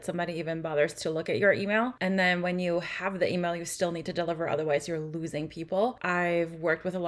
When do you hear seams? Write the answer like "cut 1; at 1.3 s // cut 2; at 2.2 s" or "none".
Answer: cut 1; at 2.0 s // cut 2; at 6.0 s